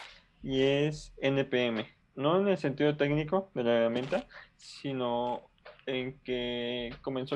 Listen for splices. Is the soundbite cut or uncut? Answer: cut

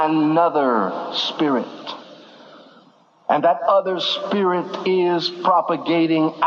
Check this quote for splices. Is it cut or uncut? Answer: uncut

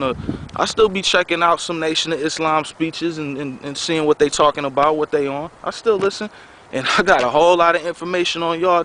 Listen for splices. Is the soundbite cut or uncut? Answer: uncut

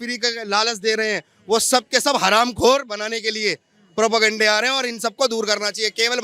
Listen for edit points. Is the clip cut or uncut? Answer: uncut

